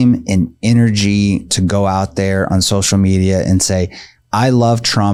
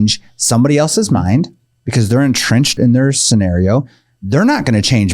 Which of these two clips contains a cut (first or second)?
second